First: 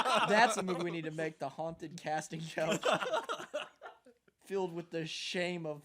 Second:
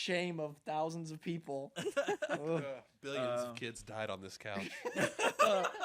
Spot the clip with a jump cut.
second; 1 cut; at 2.9 s

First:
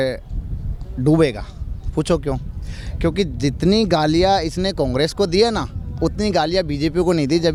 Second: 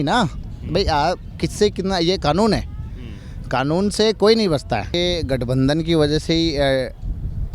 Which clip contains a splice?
second; 1 cut; at 4.9 s

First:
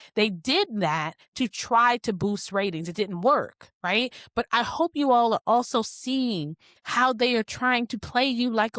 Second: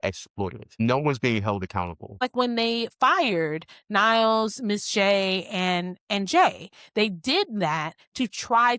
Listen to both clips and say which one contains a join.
second; 2 cuts; at 0.8 s, 2.2 s

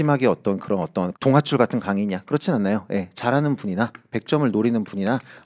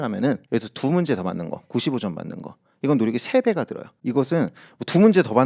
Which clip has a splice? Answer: second; 1 cut; at 3.9 s

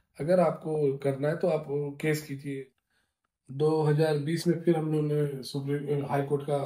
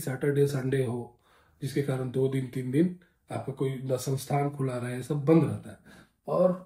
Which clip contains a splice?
first; 1 cut; at 2.4 s

